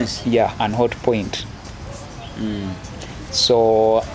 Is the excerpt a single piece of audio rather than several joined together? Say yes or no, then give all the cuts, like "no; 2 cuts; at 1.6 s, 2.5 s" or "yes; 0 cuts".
yes; 0 cuts